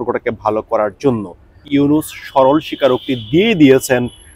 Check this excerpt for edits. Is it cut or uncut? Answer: cut